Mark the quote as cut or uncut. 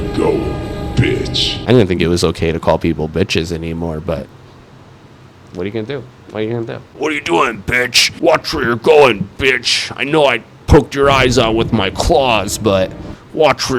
cut